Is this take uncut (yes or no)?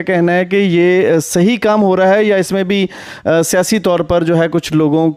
yes